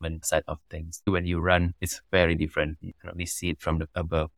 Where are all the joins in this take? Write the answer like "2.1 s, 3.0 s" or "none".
1.1 s, 2.8 s